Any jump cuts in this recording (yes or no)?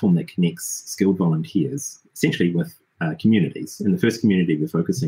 no